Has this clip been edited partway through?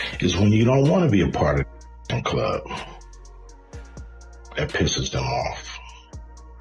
yes; 1 cut; at 5.6 s

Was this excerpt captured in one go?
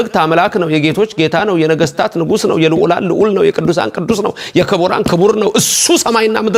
yes; 0 cuts

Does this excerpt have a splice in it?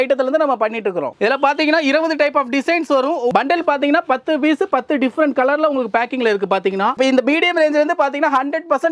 yes; 3 cuts; at 1.2 s, 3.3 s, 7.0 s

